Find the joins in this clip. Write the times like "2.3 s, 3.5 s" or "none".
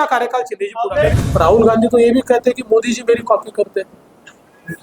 1.2 s